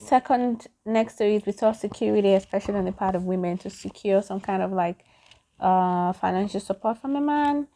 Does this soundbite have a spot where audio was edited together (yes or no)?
no